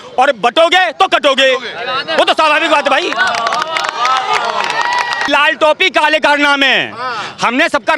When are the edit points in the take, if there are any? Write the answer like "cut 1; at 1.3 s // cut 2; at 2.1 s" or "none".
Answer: cut 1; at 5.3 s